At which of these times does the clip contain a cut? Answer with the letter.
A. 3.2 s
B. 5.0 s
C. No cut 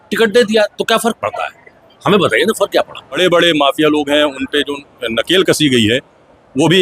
A